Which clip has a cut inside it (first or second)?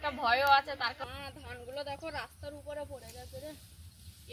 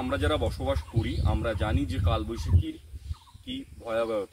first